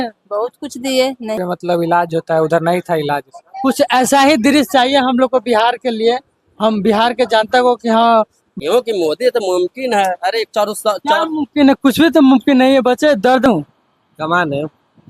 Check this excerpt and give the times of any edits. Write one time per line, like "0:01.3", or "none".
0:01.4
0:08.4
0:13.5